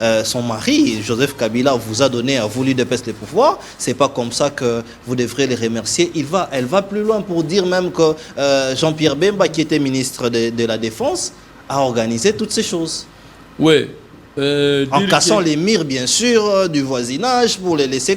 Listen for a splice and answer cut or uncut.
uncut